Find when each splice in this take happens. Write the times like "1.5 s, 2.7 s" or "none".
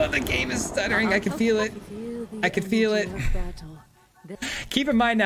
4.2 s